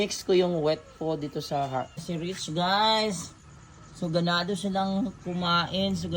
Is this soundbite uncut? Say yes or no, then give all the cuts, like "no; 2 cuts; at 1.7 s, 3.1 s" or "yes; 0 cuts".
no; 1 cut; at 2.0 s